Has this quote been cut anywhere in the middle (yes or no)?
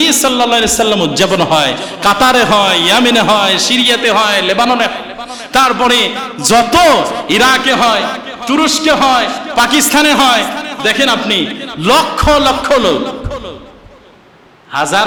no